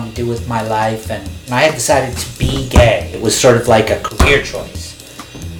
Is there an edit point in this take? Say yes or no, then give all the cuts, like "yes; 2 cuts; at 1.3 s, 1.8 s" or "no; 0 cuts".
yes; 1 cut; at 1.4 s